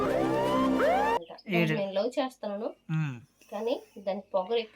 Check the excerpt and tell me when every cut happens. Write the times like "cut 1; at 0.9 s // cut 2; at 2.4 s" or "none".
cut 1; at 1.0 s